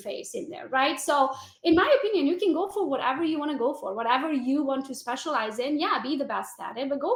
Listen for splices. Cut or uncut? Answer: uncut